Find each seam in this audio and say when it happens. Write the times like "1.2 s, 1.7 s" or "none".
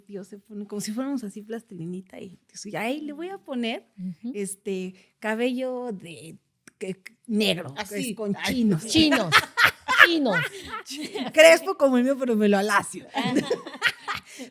none